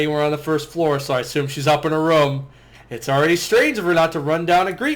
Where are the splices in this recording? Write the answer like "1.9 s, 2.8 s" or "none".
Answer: none